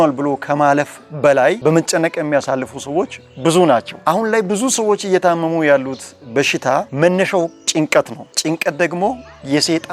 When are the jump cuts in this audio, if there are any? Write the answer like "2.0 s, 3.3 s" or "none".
none